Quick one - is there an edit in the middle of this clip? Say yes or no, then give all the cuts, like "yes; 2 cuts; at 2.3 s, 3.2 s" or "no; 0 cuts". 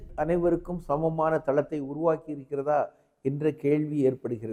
no; 0 cuts